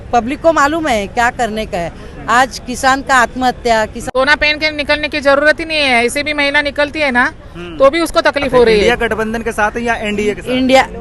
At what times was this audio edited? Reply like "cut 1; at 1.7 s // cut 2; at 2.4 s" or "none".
cut 1; at 4.0 s // cut 2; at 8.8 s